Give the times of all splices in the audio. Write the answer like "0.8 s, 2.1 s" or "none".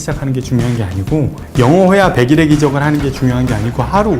1.4 s